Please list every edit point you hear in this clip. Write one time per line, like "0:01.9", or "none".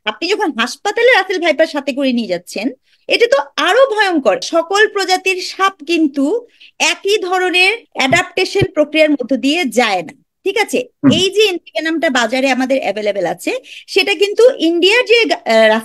0:04.4
0:07.8

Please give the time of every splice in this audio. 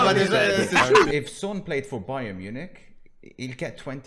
0:01.1

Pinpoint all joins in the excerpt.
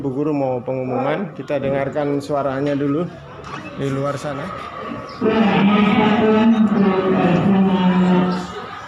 0:04.4

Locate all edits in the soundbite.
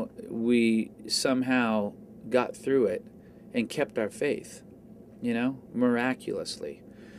0:01.5

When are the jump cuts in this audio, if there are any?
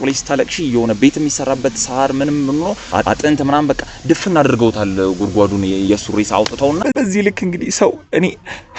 0:06.8

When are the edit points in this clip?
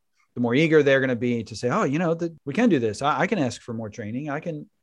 0:02.4

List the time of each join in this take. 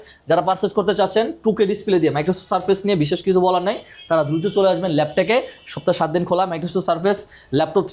none

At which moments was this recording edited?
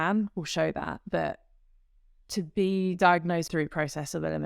0:03.5

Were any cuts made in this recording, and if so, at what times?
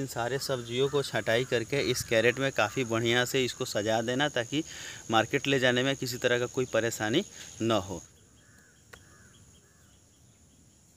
0:08.2

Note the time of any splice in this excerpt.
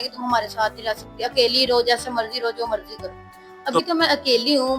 0:03.8

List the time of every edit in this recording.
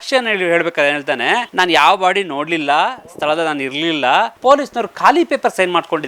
0:01.5
0:04.3

